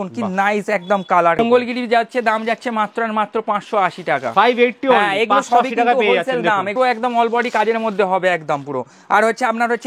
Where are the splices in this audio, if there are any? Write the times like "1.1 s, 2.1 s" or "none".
1.4 s, 6.7 s